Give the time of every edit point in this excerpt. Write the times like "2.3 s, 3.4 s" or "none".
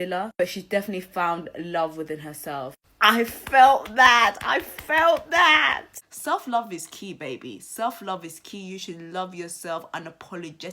5.9 s